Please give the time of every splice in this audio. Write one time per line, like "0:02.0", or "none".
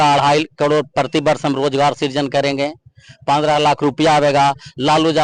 none